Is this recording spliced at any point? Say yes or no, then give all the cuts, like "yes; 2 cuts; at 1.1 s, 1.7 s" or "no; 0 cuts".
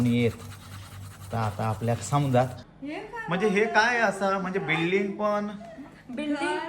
yes; 1 cut; at 2.6 s